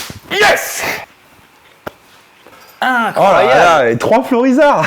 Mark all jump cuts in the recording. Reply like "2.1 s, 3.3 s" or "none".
1.0 s, 2.4 s